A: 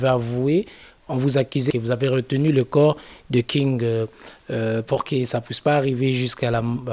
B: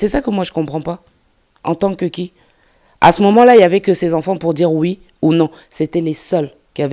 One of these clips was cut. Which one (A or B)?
A